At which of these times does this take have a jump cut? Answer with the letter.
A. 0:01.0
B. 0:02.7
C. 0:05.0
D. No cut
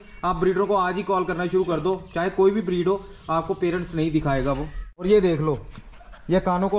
C